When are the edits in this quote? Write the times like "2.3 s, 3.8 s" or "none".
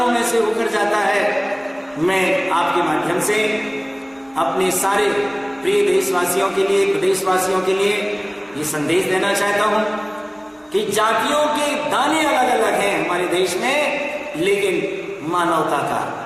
none